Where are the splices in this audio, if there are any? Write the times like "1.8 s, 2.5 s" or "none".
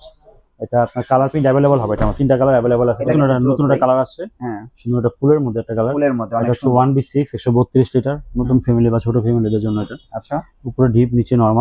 3.1 s